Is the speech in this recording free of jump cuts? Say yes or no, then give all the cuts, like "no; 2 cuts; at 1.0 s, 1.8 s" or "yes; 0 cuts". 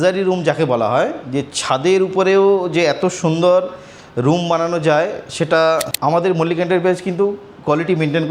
no; 1 cut; at 5.9 s